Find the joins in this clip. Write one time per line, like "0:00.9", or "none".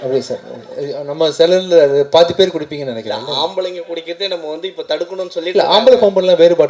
none